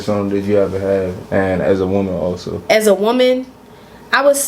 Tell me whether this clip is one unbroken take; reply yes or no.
no